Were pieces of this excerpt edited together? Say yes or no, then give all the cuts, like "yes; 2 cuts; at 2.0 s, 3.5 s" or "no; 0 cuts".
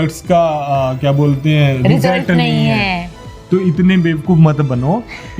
yes; 1 cut; at 3.1 s